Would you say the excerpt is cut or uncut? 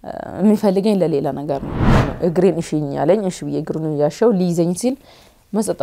cut